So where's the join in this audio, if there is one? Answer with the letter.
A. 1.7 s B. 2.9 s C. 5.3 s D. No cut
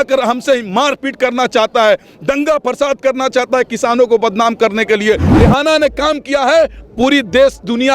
C